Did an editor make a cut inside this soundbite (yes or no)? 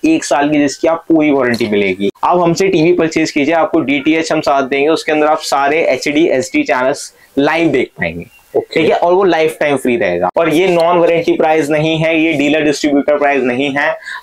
yes